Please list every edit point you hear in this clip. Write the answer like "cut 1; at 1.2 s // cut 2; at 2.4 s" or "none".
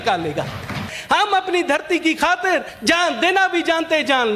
cut 1; at 0.9 s // cut 2; at 2.7 s